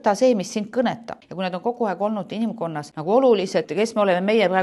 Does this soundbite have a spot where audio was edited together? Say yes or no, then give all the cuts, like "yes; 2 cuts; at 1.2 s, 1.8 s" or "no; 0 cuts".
yes; 3 cuts; at 1.2 s, 2.9 s, 3.7 s